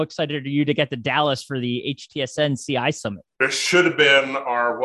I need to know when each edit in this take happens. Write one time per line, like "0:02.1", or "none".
0:03.2